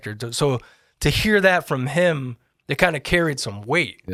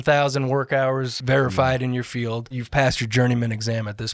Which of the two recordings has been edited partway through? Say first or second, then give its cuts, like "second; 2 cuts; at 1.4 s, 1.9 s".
second; 2 cuts; at 1.2 s, 2.6 s